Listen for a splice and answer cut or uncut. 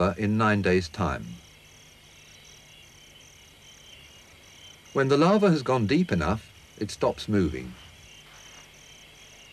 cut